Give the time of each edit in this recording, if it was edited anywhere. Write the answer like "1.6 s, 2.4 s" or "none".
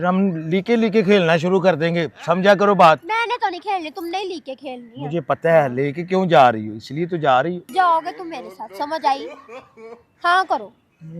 7.6 s

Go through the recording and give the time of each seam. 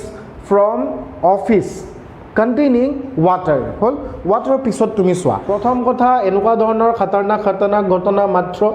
5.4 s

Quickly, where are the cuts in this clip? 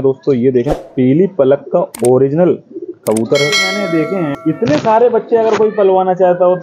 3.7 s

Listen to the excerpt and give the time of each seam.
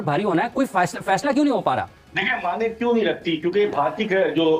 none

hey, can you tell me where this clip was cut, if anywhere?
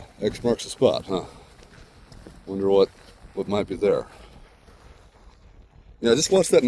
none

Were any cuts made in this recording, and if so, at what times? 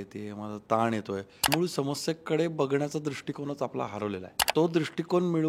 1.5 s, 4.4 s

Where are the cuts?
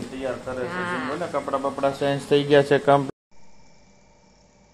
3.1 s

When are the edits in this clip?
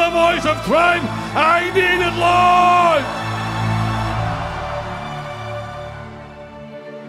6.2 s

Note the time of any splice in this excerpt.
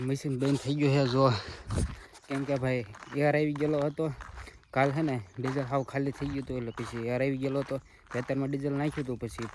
none

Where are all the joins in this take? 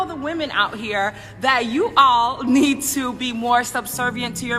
3.5 s

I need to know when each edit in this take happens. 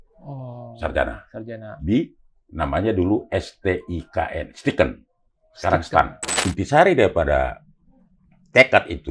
6.3 s

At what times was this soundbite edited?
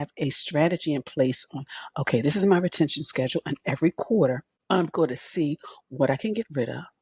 4.5 s

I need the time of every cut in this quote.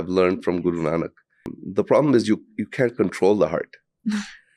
1.6 s

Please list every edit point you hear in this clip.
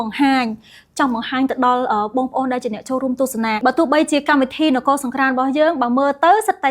3.6 s

